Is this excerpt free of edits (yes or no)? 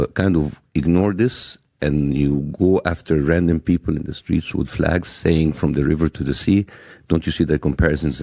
yes